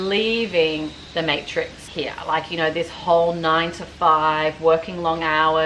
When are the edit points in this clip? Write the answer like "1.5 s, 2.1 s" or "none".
1.0 s, 1.8 s